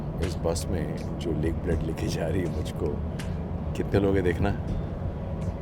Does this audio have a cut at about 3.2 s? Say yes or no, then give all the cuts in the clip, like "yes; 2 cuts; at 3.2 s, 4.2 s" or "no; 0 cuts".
no; 0 cuts